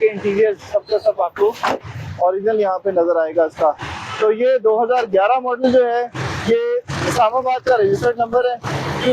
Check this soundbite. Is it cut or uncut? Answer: uncut